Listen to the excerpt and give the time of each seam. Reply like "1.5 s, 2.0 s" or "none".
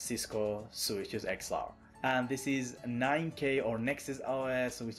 none